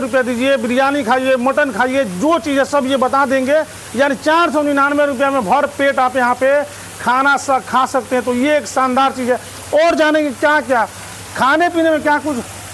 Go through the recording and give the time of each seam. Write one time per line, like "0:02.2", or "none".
none